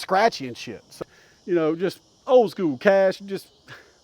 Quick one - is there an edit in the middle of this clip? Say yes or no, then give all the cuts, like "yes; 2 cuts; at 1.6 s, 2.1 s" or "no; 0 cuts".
yes; 1 cut; at 0.9 s